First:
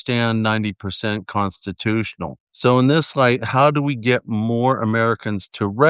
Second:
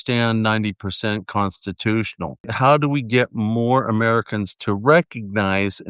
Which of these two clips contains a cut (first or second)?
second